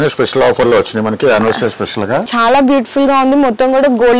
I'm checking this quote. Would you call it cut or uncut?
cut